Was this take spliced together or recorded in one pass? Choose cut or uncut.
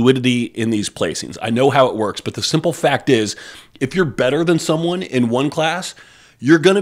uncut